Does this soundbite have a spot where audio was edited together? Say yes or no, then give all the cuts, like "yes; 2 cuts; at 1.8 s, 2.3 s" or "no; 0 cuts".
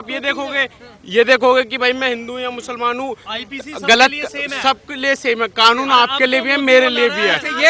no; 0 cuts